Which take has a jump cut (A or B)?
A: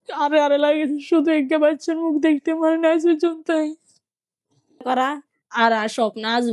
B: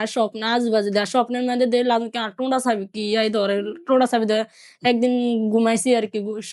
A